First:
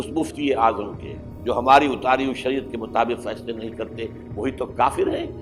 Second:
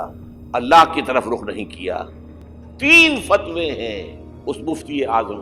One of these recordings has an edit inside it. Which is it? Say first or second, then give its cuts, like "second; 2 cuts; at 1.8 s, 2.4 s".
second; 1 cut; at 2.6 s